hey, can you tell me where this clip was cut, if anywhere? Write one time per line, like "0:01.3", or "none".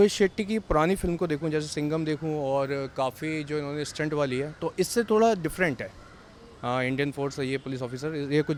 none

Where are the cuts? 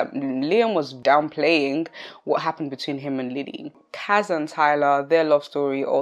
0:01.0
0:03.7

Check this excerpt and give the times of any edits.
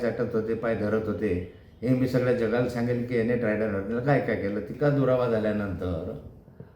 0:04.7

